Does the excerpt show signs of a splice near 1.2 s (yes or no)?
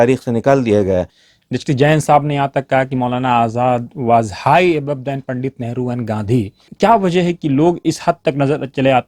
yes